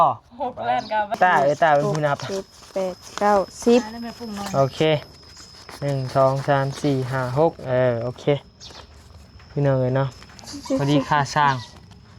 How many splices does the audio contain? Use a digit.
1